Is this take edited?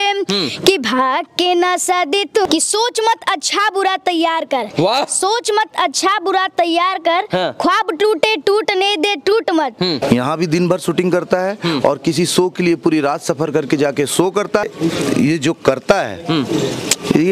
yes; 3 cuts; at 2.5 s, 10.0 s, 14.7 s

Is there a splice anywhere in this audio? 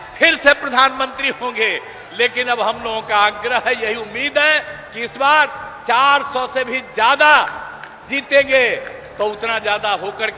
no; 0 cuts

